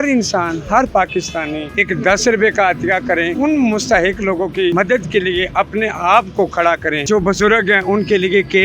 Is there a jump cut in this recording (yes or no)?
yes